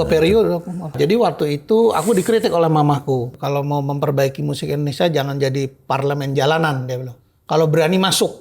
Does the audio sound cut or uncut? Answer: cut